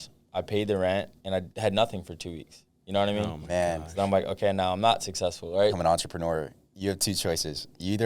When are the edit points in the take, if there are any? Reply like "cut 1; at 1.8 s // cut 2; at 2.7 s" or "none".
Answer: cut 1; at 1.5 s // cut 2; at 5.8 s